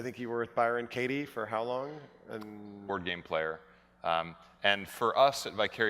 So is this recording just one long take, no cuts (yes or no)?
yes